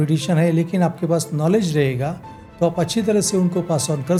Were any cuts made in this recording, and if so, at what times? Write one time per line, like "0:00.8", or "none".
none